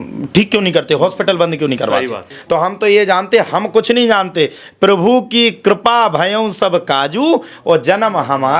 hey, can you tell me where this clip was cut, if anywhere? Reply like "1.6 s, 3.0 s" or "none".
2.3 s